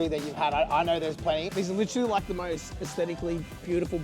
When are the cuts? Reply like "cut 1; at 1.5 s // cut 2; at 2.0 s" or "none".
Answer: cut 1; at 1.5 s